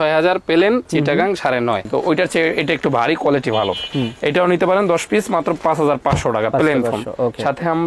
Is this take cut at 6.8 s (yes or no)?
no